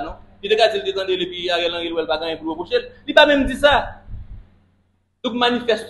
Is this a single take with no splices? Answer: yes; 0 cuts

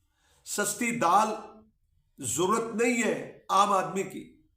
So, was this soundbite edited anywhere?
no; 0 cuts

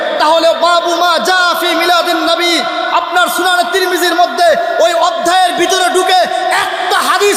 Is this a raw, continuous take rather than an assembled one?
yes; 0 cuts

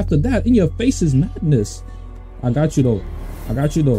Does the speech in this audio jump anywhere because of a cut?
no; 0 cuts

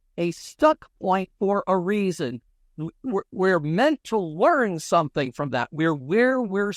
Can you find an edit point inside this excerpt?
no; 0 cuts

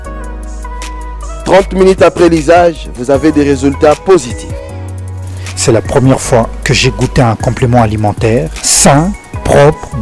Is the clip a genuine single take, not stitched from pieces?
no; 1 cut; at 1.2 s

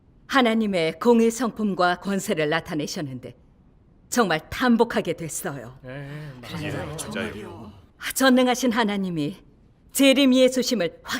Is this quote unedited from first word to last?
no; 1 cut; at 7.4 s

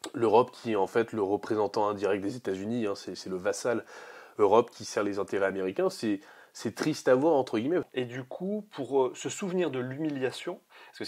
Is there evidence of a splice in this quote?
yes; 1 cut; at 7.9 s

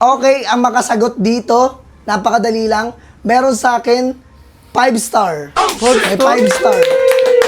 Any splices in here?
no; 0 cuts

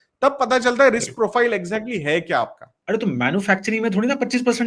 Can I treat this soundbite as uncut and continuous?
no; 1 cut; at 2.7 s

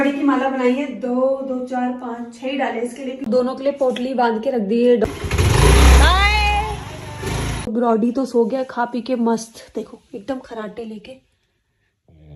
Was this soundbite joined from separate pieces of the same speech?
yes; 3 cuts; at 3.2 s, 5.0 s, 7.7 s

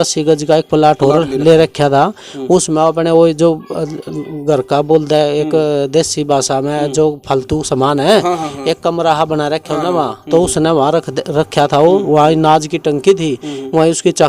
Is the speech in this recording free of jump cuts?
yes; 0 cuts

